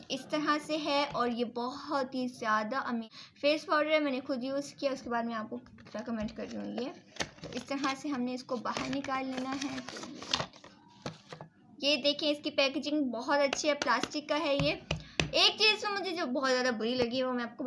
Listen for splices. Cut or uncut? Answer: cut